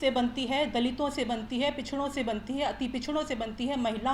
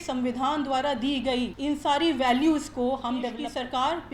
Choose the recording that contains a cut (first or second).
second